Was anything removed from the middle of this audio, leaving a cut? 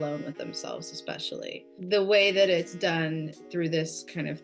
yes; 1 cut; at 1.8 s

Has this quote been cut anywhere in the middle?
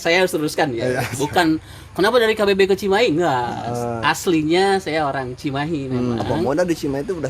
yes; 1 cut; at 6.4 s

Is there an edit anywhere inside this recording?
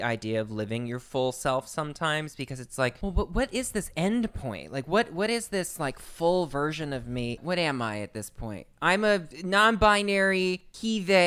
yes; 3 cuts; at 3.0 s, 7.4 s, 9.3 s

